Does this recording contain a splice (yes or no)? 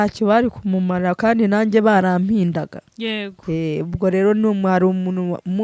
no